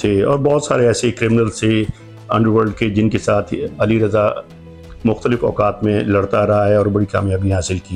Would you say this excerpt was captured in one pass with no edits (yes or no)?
yes